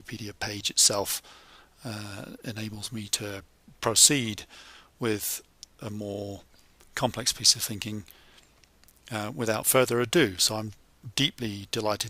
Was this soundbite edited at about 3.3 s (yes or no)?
no